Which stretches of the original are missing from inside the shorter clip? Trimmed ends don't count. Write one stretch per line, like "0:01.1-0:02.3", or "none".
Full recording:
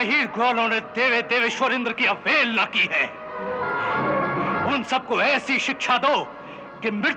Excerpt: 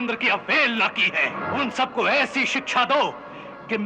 0:03.2-0:04.5

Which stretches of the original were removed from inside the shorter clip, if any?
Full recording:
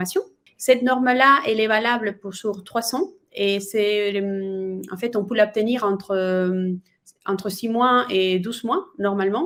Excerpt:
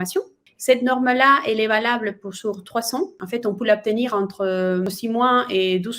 0:03.2-0:04.9
0:06.5-0:07.4

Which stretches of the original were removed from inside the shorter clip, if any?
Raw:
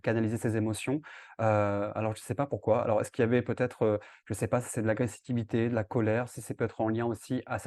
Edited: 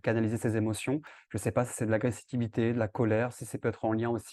0:01.2-0:04.2

